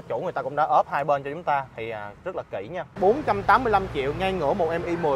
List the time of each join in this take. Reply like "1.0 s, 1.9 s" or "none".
3.0 s

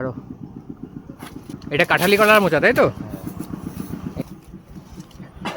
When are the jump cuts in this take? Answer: 1.5 s, 4.2 s

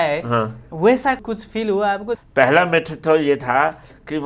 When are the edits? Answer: 2.2 s

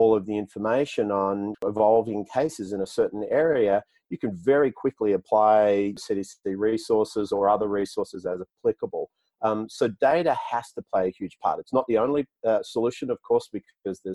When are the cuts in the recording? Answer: 1.6 s, 6.0 s

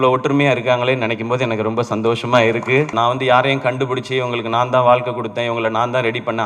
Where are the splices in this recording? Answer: 2.9 s

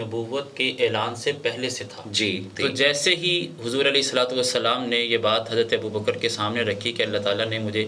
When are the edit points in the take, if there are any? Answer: 2.5 s

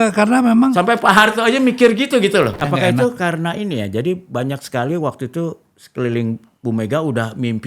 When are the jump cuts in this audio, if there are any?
2.6 s

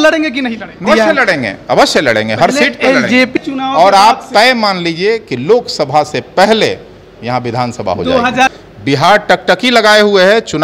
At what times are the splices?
0.8 s, 3.3 s, 8.5 s

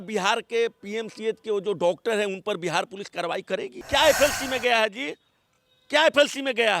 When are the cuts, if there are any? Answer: 3.7 s

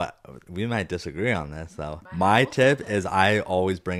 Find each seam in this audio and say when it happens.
2.2 s

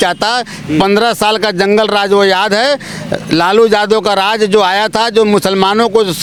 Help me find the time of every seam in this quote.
none

